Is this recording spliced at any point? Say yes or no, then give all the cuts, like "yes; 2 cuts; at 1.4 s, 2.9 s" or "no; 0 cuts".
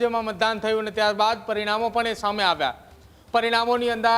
no; 0 cuts